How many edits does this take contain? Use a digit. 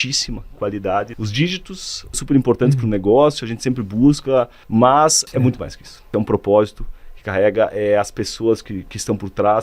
4